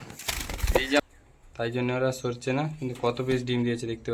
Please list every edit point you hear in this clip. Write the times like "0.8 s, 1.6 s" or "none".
1.0 s